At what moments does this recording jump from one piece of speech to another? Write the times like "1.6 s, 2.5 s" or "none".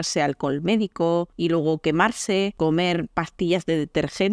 1.3 s, 2.5 s